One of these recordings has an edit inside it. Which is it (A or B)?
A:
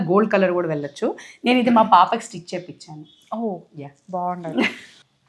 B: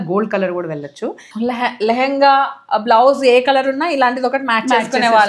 B